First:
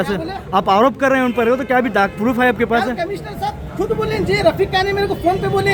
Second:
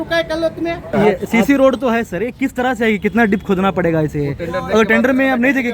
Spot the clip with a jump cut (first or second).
second